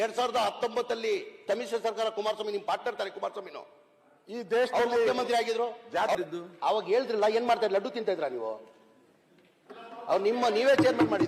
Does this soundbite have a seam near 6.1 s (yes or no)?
yes